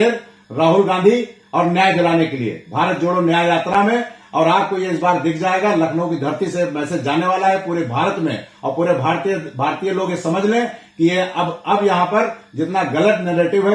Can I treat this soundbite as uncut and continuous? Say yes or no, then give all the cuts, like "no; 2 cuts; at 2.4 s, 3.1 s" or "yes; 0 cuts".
yes; 0 cuts